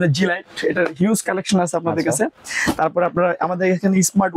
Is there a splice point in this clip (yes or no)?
no